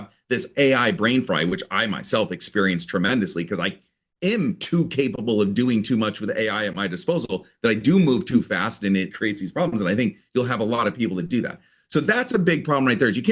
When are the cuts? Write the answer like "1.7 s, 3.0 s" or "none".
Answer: 9.1 s